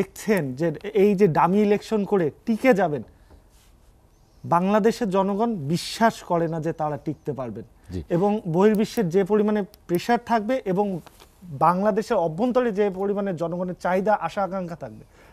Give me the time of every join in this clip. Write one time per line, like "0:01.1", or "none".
none